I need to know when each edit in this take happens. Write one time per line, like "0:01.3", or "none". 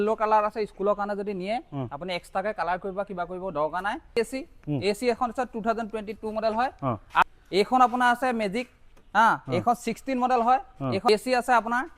0:04.2
0:07.2
0:11.1